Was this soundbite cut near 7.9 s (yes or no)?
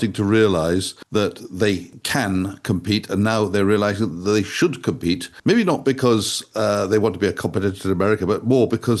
no